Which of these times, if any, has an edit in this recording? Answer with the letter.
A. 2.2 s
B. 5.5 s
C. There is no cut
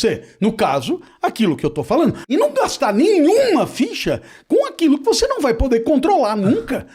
A